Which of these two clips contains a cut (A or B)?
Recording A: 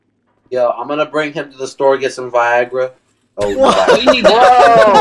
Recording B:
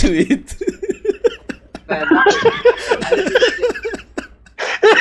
A